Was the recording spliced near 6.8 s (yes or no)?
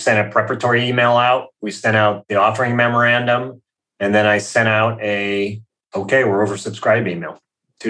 no